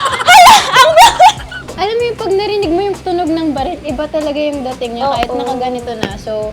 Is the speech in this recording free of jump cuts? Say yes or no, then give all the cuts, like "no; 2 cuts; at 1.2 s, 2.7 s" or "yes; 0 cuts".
no; 1 cut; at 1.7 s